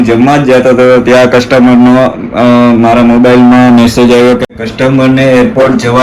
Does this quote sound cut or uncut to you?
uncut